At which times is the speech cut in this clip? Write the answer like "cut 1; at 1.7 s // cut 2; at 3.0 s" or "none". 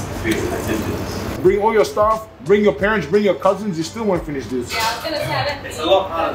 cut 1; at 1.3 s